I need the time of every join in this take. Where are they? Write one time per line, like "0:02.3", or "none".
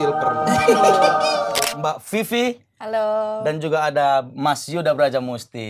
0:01.5